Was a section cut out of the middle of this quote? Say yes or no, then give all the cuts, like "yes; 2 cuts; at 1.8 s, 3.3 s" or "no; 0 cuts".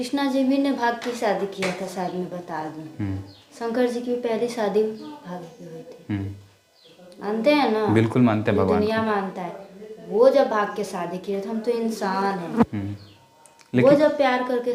no; 0 cuts